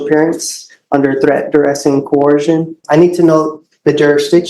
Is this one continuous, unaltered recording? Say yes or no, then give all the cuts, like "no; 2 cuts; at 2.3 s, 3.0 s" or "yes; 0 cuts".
no; 1 cut; at 2.8 s